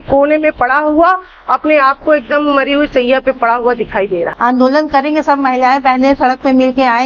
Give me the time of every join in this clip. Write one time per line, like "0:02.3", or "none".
0:04.3